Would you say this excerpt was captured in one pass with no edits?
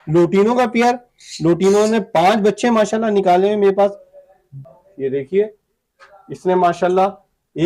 no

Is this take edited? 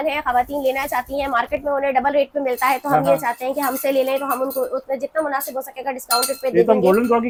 no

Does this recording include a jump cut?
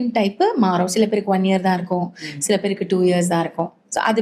no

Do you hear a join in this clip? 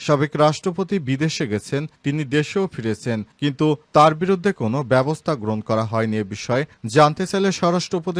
no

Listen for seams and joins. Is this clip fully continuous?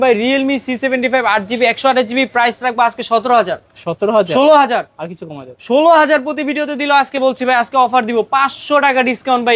yes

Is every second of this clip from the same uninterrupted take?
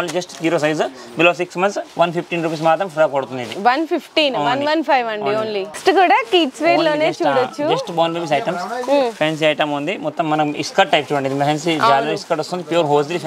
yes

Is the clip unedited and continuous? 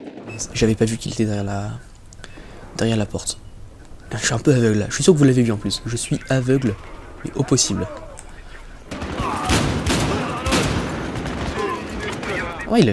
yes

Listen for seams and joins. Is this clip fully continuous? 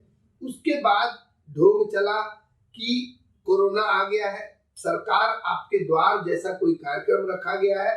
no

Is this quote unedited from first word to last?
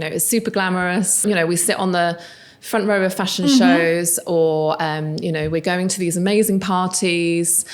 no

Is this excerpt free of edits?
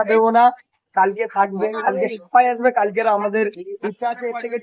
yes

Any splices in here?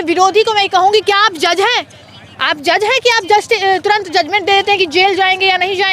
no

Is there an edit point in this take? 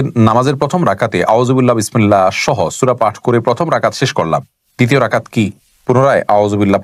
no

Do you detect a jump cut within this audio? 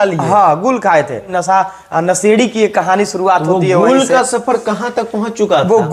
yes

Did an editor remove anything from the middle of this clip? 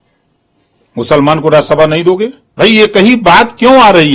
yes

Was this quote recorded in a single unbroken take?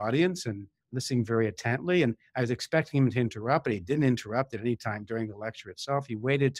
yes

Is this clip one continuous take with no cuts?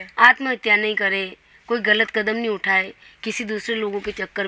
yes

